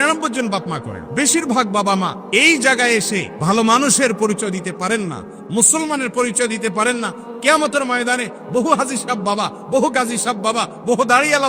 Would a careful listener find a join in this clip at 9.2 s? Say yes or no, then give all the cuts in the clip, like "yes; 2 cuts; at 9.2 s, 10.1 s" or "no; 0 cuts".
no; 3 cuts; at 1.0 s, 2.2 s, 3.3 s